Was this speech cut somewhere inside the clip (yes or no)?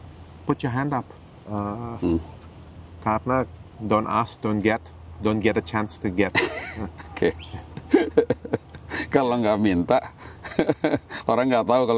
no